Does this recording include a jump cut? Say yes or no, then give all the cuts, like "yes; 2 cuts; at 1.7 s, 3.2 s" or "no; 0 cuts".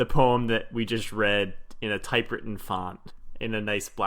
yes; 1 cut; at 3.0 s